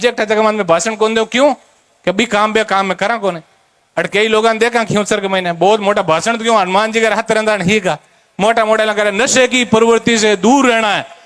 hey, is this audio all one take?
yes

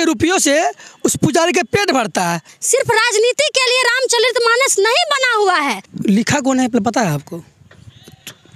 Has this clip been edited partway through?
yes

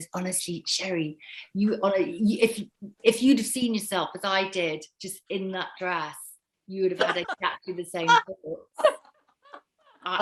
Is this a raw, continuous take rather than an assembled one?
yes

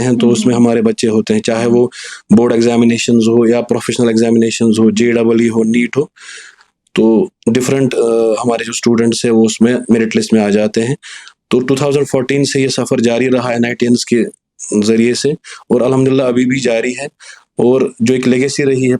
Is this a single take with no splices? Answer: yes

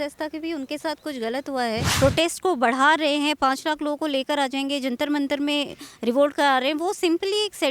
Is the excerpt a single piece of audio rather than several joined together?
no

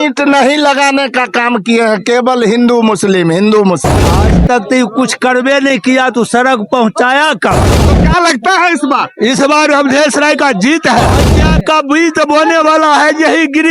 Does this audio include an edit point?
yes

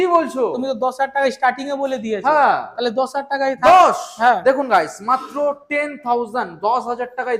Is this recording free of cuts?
yes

